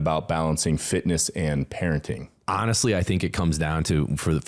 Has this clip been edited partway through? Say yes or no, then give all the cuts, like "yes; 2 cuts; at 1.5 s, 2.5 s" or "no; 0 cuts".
yes; 1 cut; at 2.3 s